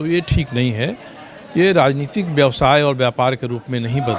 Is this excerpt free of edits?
yes; 0 cuts

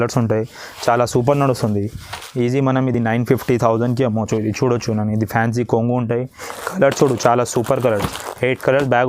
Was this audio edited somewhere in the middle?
no; 0 cuts

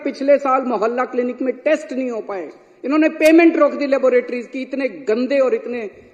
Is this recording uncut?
yes; 0 cuts

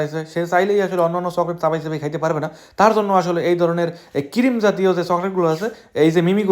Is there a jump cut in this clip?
no; 0 cuts

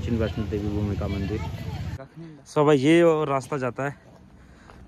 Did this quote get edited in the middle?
yes; 1 cut; at 2.0 s

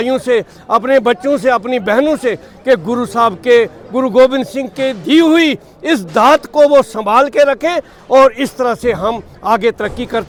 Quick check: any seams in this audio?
no; 0 cuts

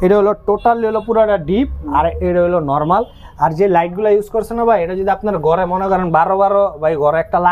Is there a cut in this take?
no; 0 cuts

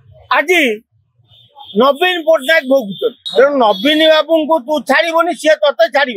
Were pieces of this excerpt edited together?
yes; 1 cut; at 3.2 s

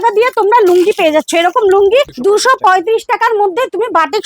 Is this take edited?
yes; 1 cut; at 2.1 s

